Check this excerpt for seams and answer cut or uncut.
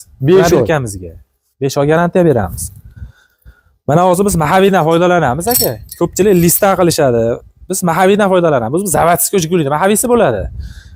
uncut